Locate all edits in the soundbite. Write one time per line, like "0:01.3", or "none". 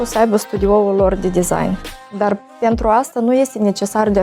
none